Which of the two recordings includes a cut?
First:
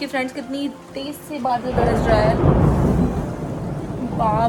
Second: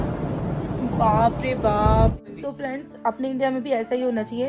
second; 1 cut; at 2.3 s

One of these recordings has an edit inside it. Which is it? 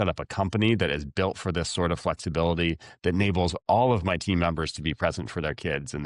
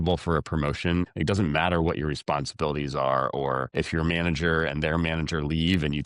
second; 2 cuts; at 1.1 s, 3.7 s

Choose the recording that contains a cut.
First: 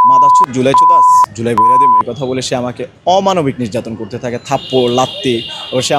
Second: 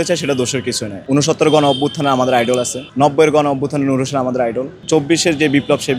second; 3 cuts; at 0.9 s, 2.8 s, 4.7 s

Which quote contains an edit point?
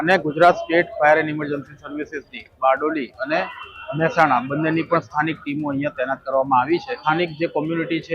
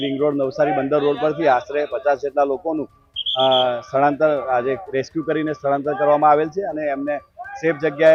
first; 1 cut; at 7.0 s

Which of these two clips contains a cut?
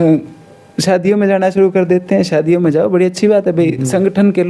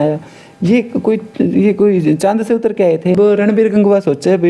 second; 1 cut; at 3.2 s

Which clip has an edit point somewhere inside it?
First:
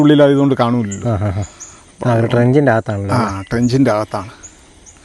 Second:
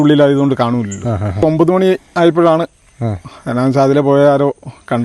second; 1 cut; at 1.4 s

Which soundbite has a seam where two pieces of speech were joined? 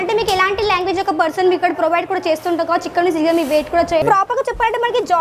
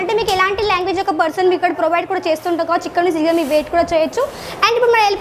first; 1 cut; at 4.0 s

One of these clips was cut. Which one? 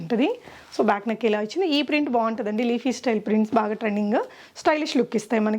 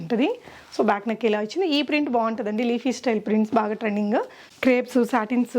second; 1 cut; at 4.4 s

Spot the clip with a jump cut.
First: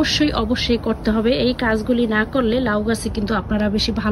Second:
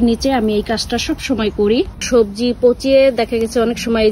second; 1 cut; at 2.1 s

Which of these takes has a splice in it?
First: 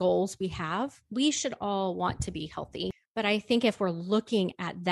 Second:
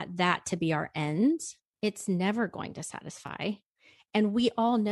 first; 1 cut; at 3.0 s

